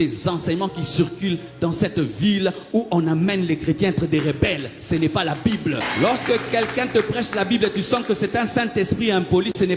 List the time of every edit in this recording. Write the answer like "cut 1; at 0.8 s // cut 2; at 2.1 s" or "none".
cut 1; at 5.9 s